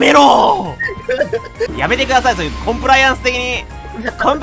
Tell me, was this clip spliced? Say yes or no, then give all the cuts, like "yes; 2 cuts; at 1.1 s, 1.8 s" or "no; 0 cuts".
yes; 1 cut; at 1.7 s